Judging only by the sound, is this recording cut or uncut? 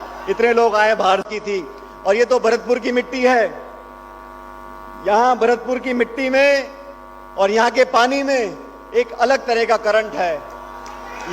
cut